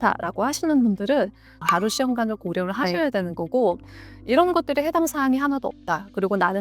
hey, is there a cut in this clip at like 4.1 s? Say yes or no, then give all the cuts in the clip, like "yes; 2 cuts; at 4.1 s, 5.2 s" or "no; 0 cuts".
no; 1 cut; at 1.5 s